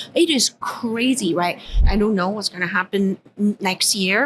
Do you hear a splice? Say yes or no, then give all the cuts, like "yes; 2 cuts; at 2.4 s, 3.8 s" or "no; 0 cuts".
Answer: yes; 1 cut; at 1.8 s